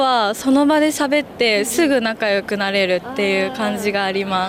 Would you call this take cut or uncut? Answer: uncut